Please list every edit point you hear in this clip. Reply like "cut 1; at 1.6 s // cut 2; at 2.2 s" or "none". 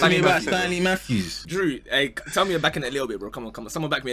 cut 1; at 1.4 s